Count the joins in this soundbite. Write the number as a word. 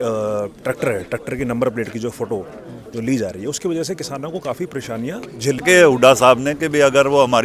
one